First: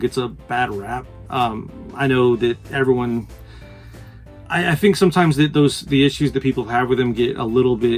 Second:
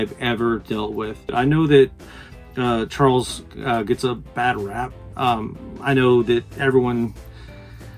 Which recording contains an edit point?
second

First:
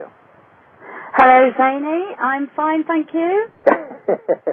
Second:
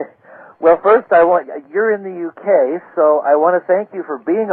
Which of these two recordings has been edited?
first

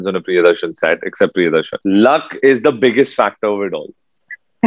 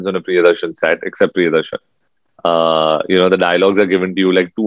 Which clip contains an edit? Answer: first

